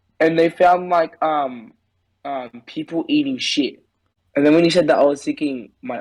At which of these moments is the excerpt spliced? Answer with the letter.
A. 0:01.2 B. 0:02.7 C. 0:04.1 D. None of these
C